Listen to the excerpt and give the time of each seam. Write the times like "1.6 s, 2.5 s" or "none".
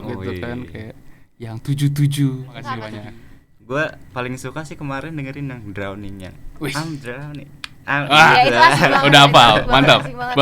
2.9 s